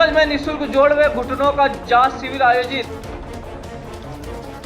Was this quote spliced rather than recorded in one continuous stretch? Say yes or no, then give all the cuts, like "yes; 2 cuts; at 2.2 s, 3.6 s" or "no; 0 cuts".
yes; 1 cut; at 3.3 s